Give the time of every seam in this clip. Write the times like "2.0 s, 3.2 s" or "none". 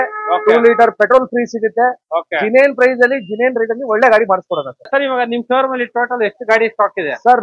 4.9 s